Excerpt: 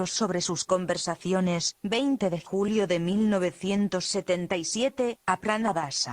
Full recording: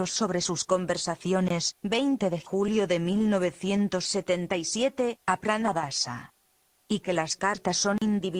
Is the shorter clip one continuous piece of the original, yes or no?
yes